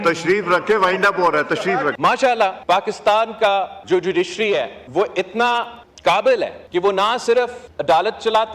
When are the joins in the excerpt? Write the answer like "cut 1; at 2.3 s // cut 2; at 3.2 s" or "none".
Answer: cut 1; at 1.9 s // cut 2; at 2.6 s // cut 3; at 3.8 s // cut 4; at 4.8 s // cut 5; at 5.8 s // cut 6; at 6.6 s // cut 7; at 7.7 s